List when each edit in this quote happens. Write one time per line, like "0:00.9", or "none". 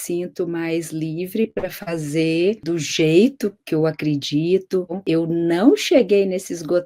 0:05.0